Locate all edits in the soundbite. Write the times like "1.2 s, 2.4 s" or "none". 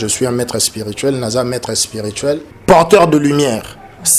2.5 s